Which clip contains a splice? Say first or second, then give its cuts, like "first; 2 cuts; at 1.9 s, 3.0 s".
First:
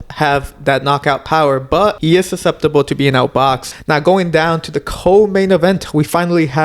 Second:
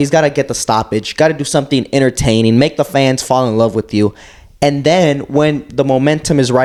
first; 2 cuts; at 2.0 s, 3.6 s